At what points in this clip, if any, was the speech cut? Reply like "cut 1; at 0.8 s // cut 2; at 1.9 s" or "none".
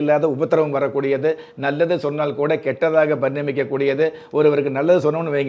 none